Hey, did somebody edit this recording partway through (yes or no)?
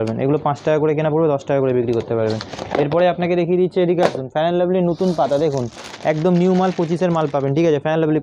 no